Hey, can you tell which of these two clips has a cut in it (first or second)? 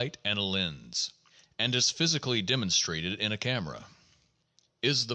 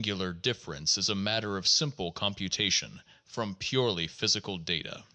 first